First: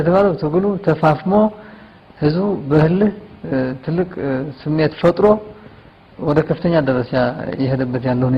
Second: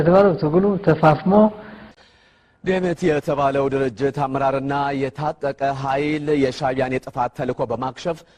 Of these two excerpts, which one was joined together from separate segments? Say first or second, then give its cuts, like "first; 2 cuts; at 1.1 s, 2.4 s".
second; 1 cut; at 2.0 s